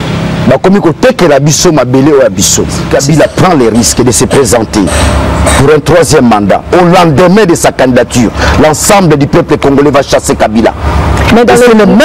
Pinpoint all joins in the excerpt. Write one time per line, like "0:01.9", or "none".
0:02.8